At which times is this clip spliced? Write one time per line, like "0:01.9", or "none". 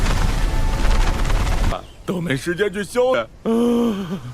0:01.7